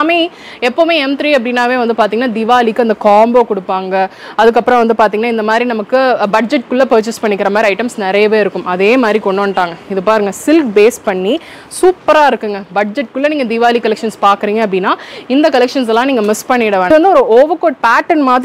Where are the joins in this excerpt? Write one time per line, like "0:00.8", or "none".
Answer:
0:16.9